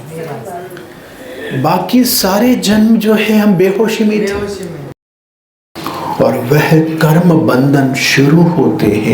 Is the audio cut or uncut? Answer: cut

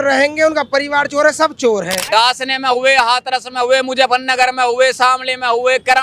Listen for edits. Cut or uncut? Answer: cut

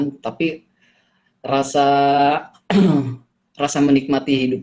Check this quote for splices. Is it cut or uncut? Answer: uncut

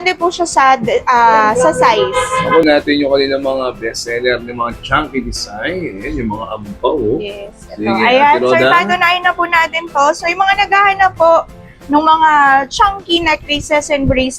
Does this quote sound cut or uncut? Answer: cut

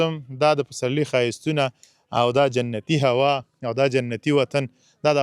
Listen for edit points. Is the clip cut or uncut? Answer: uncut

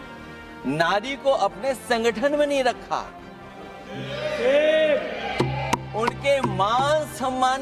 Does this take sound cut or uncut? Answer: uncut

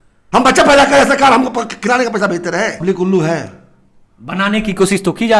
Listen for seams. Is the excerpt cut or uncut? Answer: cut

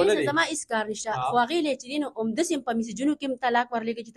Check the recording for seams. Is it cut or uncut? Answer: uncut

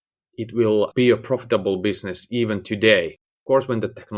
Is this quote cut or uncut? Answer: cut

